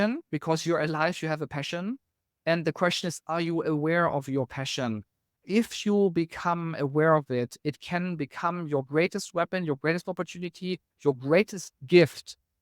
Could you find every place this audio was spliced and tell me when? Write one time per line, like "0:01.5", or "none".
0:05.4

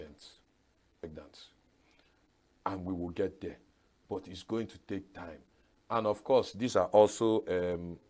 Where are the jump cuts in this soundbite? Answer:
0:01.1

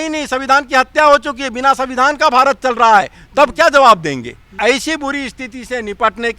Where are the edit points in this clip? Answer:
0:04.6

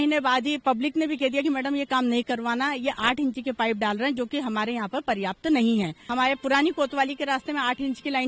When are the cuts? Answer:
0:06.0

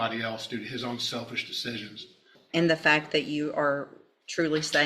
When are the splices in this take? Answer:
0:02.4

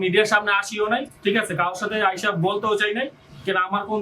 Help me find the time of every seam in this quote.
none

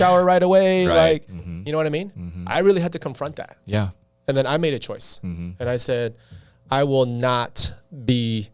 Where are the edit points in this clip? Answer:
none

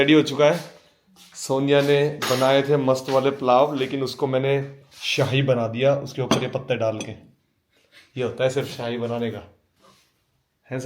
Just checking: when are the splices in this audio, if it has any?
none

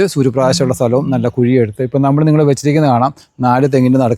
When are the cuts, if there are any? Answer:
none

